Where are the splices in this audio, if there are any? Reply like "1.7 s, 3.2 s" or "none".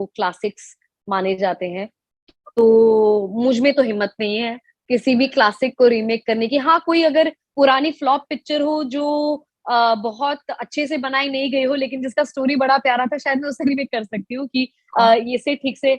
none